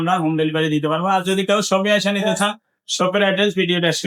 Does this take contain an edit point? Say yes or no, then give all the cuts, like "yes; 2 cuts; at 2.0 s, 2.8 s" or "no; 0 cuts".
no; 0 cuts